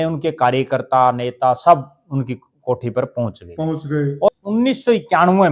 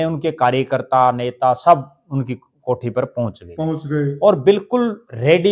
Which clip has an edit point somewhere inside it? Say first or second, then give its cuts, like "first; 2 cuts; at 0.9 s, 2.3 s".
first; 1 cut; at 4.3 s